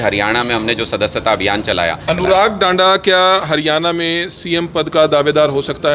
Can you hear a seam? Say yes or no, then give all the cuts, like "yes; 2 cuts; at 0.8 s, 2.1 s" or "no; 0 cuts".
yes; 1 cut; at 2.0 s